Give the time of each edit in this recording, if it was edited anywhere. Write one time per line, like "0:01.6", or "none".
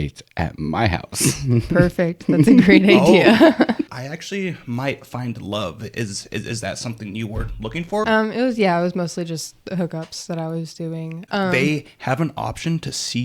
0:03.9
0:08.0
0:11.1